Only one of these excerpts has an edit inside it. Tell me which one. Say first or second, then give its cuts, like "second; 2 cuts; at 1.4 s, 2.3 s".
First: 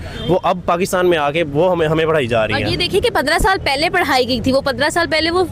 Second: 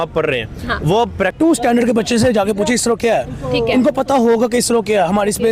second; 1 cut; at 1.3 s